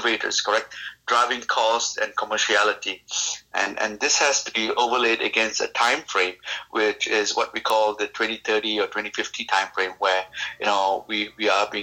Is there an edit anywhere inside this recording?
no; 0 cuts

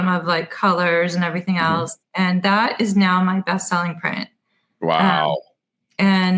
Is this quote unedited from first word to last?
yes; 0 cuts

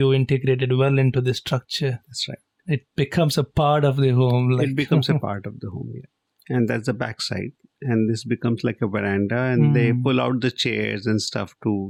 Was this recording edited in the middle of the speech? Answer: no; 0 cuts

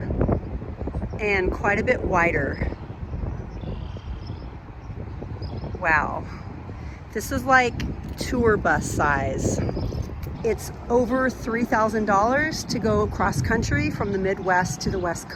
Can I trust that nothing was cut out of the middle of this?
yes; 0 cuts

